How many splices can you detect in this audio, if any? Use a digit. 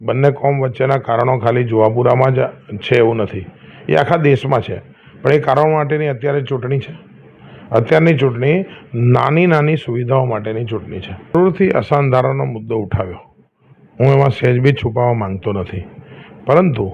1